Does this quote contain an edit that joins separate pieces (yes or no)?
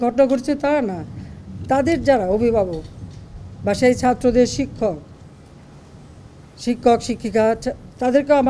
no